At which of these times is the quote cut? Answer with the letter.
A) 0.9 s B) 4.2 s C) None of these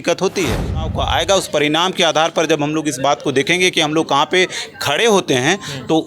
A